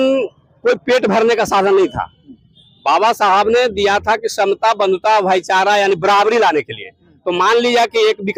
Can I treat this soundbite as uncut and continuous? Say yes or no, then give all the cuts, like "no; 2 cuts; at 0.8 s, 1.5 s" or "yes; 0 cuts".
yes; 0 cuts